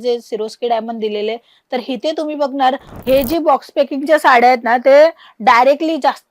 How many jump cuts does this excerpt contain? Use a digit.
1